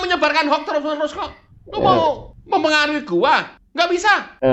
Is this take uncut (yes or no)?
yes